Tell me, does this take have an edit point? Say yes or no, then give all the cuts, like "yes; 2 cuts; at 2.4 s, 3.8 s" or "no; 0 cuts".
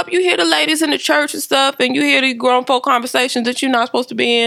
no; 0 cuts